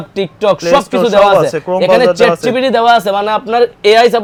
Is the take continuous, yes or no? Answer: yes